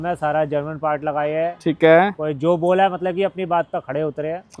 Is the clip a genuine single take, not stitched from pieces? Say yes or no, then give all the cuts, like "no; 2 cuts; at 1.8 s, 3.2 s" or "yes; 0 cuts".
yes; 0 cuts